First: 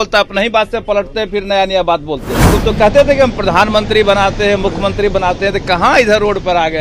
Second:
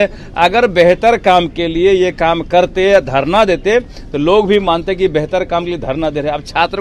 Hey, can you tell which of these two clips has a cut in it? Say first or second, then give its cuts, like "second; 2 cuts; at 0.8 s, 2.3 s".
first; 1 cut; at 2.5 s